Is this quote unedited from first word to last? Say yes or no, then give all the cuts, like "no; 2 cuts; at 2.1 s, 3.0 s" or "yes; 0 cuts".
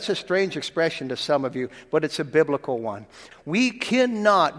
no; 1 cut; at 3.1 s